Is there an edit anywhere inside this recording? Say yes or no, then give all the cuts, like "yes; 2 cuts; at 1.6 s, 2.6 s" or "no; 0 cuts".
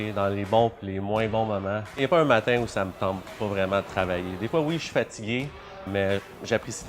yes; 2 cuts; at 2.0 s, 5.9 s